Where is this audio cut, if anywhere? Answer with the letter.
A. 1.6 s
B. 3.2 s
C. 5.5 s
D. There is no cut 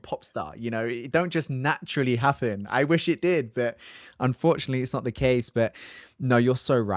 D